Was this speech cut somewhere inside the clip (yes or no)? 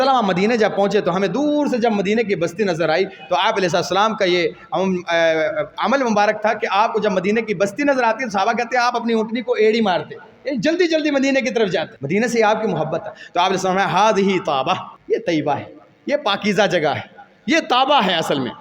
yes